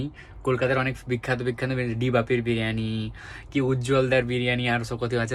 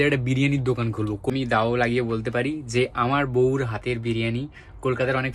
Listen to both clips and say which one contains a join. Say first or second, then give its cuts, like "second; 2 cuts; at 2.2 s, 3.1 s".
second; 1 cut; at 1.3 s